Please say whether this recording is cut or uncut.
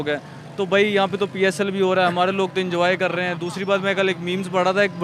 uncut